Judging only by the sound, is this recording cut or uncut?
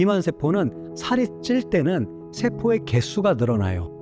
uncut